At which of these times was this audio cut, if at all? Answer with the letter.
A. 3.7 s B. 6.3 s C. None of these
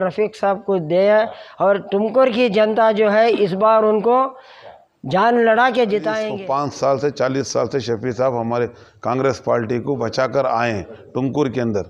B